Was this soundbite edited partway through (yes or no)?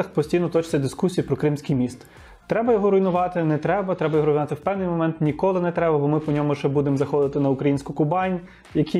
no